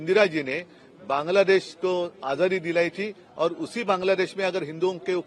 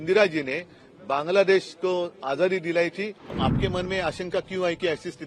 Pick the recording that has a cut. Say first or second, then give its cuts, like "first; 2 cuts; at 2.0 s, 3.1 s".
second; 1 cut; at 3.2 s